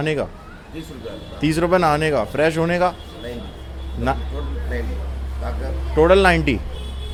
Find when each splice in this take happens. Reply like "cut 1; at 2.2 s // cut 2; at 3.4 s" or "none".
none